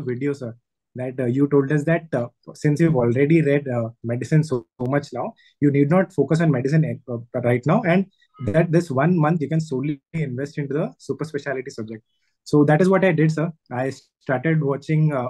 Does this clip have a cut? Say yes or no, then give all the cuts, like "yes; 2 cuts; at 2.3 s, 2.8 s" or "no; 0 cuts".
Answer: no; 0 cuts